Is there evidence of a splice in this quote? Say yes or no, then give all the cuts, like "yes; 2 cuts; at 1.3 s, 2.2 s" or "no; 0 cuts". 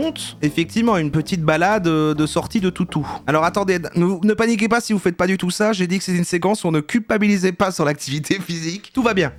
no; 0 cuts